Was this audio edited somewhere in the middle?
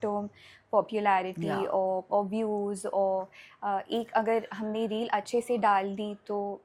no; 0 cuts

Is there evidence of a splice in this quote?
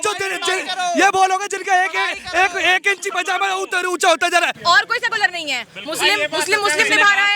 yes; 1 cut; at 4.5 s

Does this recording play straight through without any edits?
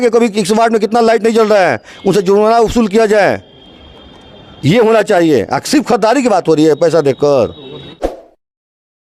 yes; 0 cuts

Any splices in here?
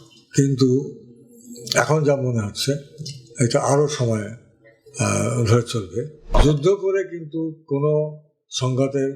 yes; 1 cut; at 6.3 s

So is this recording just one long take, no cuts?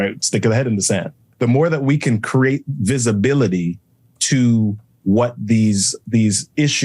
no; 1 cut; at 1.3 s

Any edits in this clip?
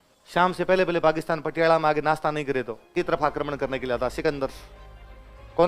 yes; 1 cut; at 2.9 s

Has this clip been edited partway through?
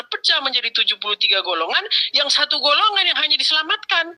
no; 0 cuts

